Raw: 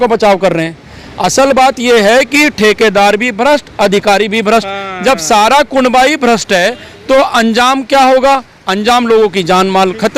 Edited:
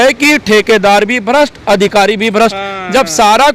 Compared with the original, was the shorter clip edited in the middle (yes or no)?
no